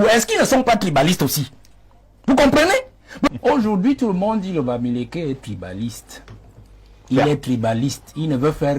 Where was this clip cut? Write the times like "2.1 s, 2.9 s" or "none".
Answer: 3.3 s

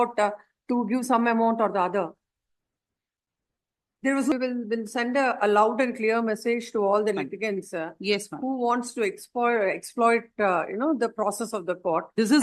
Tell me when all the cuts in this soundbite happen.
4.3 s

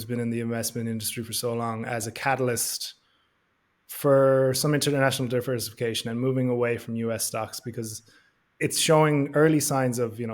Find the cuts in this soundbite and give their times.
8.6 s

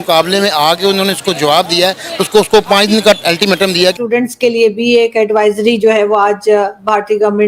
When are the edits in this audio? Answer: 3.9 s

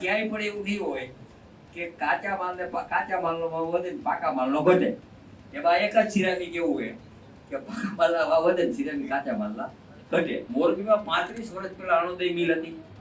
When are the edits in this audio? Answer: 10.4 s

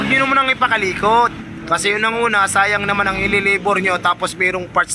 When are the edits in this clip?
none

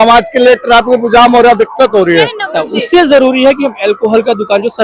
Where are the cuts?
2.6 s

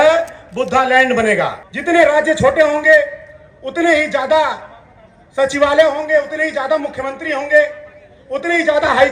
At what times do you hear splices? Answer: 1.7 s

